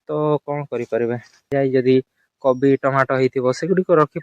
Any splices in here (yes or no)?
yes